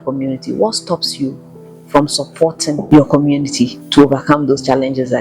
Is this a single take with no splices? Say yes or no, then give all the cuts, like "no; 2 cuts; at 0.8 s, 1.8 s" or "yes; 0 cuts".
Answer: no; 2 cuts; at 2.8 s, 3.8 s